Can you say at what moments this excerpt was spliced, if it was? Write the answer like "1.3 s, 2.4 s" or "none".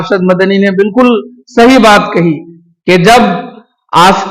none